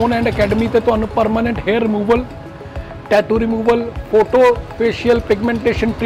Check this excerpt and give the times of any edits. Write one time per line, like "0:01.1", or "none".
none